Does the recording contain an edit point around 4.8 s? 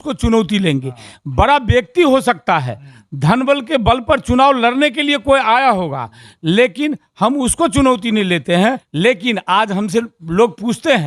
no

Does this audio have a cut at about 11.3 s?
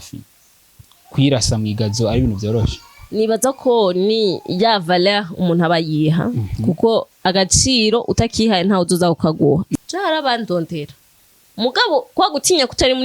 no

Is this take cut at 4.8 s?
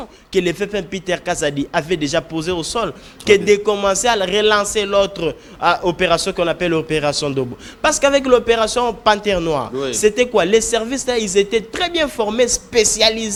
no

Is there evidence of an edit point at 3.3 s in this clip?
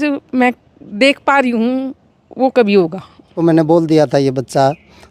yes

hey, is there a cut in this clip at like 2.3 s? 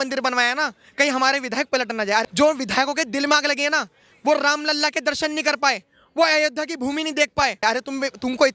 yes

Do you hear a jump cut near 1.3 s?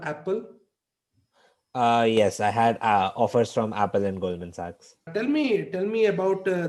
no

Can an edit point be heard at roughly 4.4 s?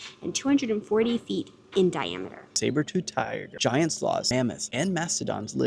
yes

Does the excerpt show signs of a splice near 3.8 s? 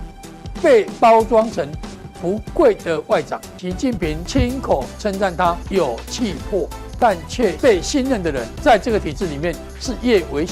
yes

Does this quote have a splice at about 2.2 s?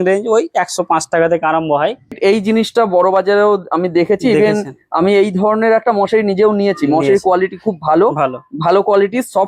yes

